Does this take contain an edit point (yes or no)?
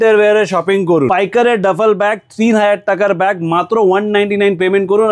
yes